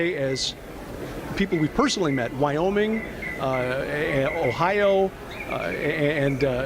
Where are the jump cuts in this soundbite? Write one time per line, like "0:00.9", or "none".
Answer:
0:01.5